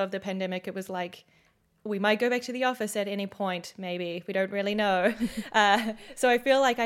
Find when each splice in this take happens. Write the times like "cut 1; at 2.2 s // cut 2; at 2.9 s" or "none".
none